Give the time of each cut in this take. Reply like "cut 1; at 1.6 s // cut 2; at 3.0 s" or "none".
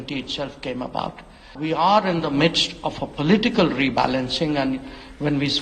cut 1; at 1.5 s